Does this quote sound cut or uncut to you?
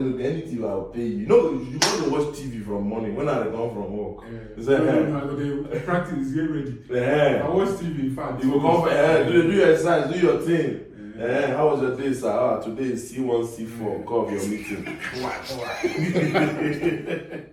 uncut